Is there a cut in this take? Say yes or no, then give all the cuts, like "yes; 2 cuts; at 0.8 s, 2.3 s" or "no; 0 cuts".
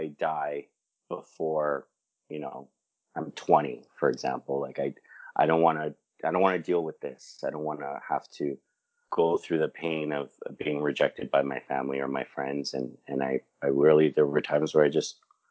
no; 0 cuts